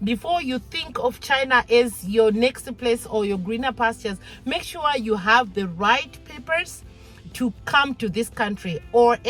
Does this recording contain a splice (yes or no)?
no